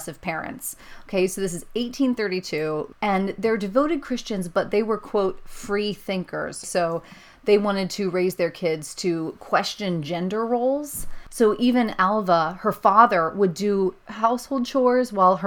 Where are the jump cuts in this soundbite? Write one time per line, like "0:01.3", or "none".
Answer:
0:02.9
0:06.7
0:11.4
0:14.1